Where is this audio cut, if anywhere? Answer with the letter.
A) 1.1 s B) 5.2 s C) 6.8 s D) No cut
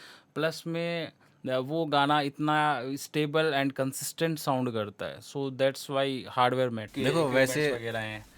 C